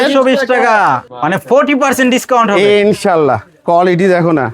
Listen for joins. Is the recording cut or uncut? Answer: cut